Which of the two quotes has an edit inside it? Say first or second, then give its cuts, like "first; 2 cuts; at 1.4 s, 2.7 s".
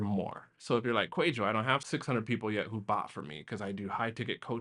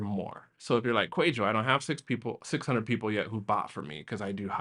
first; 1 cut; at 1.8 s